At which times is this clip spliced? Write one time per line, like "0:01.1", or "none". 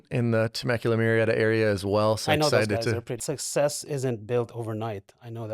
0:03.1